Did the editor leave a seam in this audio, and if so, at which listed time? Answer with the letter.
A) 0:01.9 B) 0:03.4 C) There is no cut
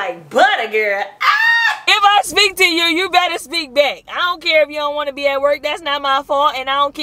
A